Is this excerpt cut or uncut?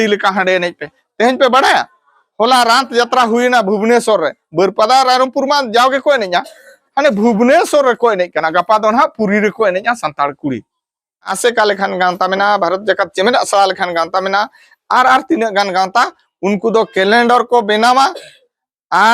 cut